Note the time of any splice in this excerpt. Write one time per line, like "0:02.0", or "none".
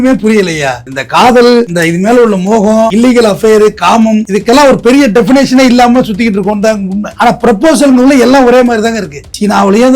0:07.0